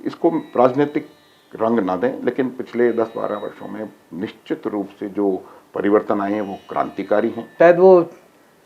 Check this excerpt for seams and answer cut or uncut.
cut